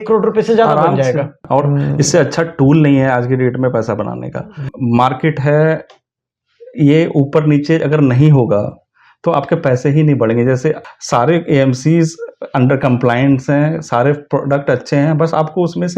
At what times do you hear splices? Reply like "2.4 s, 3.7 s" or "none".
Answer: 1.4 s, 4.7 s, 10.9 s